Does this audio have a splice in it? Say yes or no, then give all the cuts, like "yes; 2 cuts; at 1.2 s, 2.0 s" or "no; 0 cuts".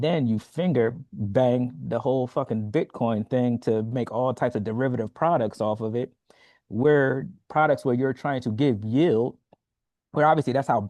no; 0 cuts